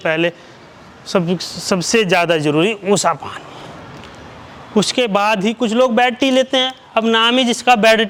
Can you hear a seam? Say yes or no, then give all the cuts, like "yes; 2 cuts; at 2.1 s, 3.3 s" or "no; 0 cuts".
no; 0 cuts